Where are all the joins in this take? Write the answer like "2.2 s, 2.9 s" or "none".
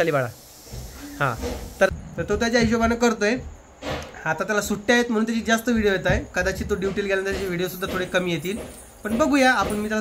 1.9 s